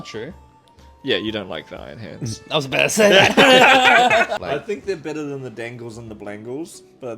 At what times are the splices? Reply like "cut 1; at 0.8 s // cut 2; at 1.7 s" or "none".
cut 1; at 4.4 s